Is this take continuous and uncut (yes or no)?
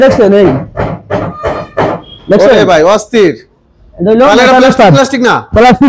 yes